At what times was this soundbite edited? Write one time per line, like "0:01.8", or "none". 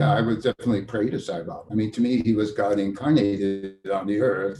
0:01.6